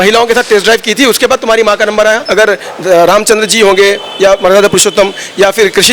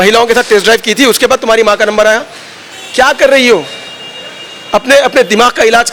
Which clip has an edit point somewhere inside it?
first; 1 cut; at 2.2 s

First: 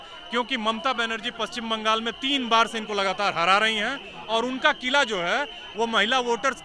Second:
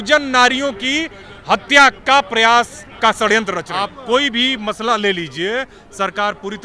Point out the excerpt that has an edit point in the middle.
second; 2 cuts; at 2.8 s, 3.7 s

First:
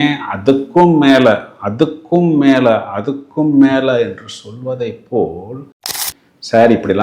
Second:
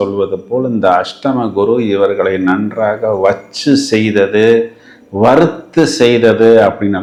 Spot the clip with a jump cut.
first; 1 cut; at 6.0 s

